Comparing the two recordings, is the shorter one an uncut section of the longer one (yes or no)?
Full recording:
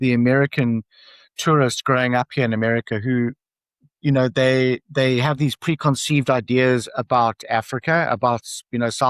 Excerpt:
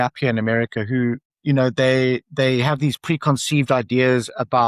no